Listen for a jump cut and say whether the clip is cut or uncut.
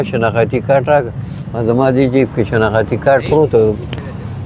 uncut